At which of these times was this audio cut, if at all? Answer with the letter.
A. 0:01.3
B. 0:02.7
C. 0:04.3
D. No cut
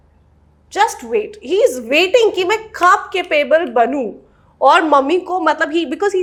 D